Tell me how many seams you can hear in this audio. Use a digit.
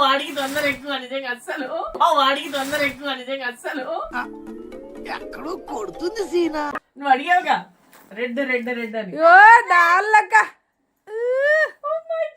0